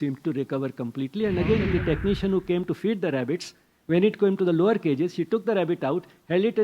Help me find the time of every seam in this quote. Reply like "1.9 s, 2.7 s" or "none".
1.6 s